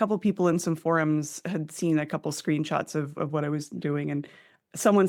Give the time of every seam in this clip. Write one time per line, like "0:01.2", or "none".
none